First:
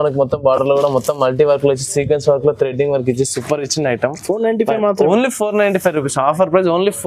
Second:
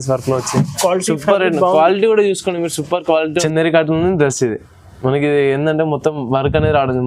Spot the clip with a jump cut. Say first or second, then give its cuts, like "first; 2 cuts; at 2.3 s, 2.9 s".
second; 1 cut; at 3.5 s